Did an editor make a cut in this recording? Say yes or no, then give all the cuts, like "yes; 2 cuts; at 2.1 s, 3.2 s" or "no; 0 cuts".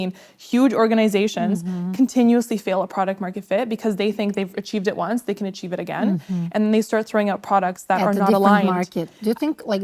no; 0 cuts